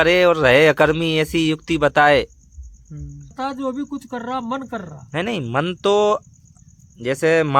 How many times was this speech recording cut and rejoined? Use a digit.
1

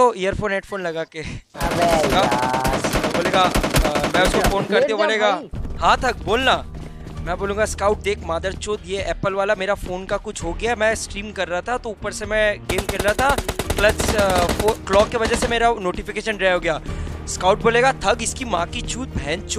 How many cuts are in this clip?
1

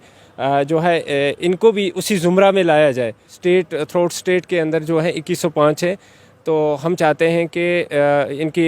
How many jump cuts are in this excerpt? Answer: 1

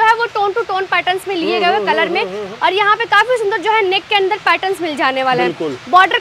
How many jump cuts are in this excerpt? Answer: 0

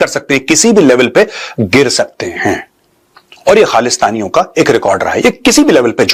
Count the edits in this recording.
0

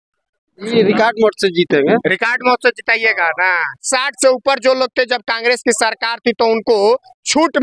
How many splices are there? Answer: 1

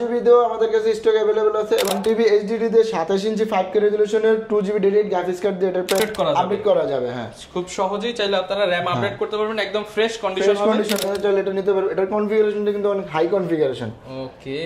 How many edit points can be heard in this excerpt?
3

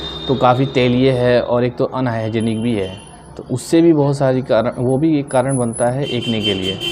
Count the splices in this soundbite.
0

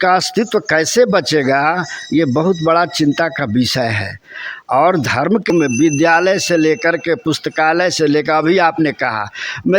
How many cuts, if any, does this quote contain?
1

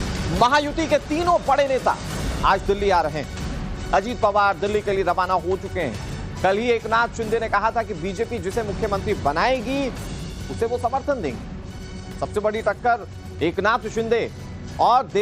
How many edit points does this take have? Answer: 1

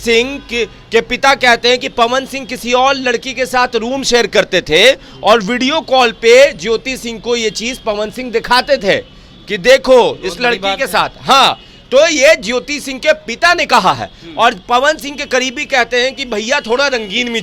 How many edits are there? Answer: 0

